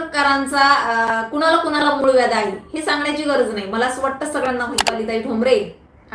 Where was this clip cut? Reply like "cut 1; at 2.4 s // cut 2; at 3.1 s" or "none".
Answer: cut 1; at 4.8 s